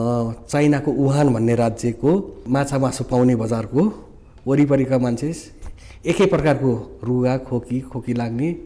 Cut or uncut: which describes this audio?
cut